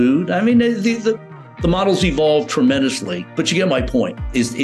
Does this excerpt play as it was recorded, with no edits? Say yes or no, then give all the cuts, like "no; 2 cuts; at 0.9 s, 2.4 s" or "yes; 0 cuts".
no; 1 cut; at 3.2 s